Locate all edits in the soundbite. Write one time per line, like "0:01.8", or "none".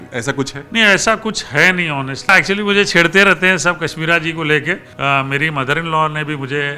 0:02.3
0:04.9